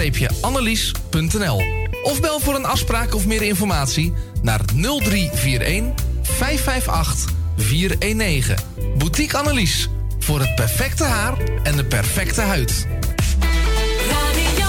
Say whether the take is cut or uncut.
uncut